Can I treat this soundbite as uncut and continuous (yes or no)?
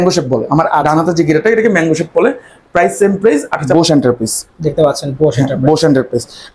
no